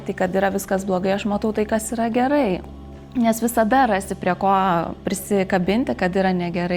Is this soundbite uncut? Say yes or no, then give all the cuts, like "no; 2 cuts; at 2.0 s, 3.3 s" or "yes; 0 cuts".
yes; 0 cuts